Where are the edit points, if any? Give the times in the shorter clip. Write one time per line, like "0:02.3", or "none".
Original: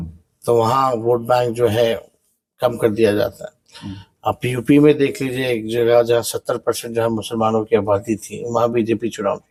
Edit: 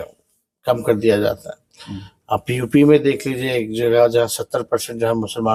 none